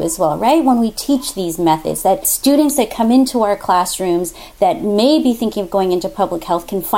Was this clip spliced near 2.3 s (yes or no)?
yes